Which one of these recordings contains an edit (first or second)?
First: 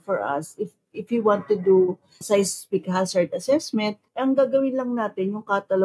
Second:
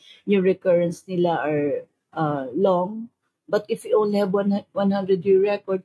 first